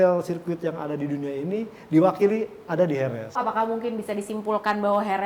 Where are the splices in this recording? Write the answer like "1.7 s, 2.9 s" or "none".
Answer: 3.4 s